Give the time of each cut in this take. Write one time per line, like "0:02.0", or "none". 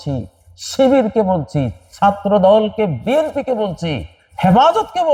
none